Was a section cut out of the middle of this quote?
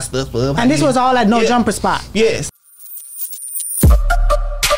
yes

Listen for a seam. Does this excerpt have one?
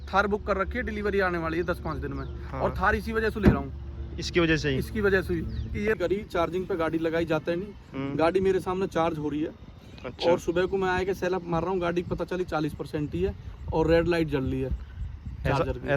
yes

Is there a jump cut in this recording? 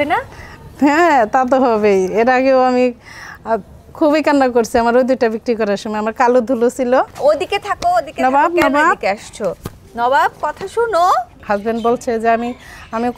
yes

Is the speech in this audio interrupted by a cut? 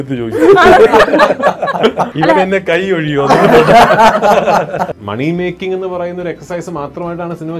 yes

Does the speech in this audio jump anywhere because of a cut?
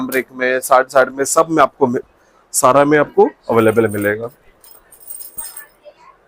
no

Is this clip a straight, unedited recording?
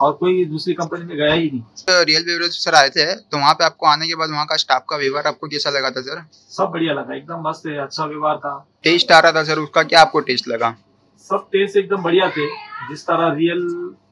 no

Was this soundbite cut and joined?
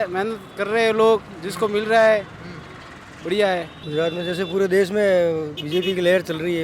yes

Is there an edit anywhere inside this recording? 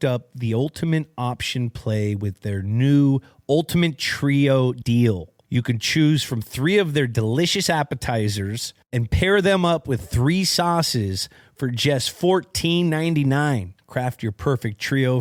no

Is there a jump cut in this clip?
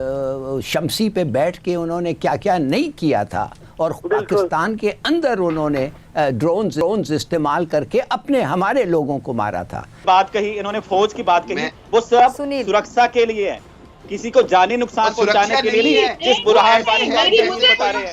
yes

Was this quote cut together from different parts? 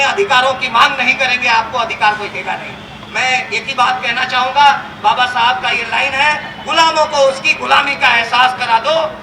no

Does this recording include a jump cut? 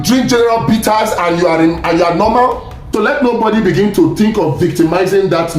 yes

